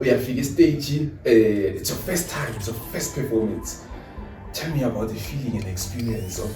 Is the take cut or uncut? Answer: uncut